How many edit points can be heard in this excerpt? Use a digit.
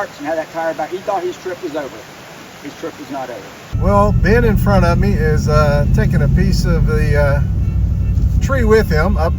1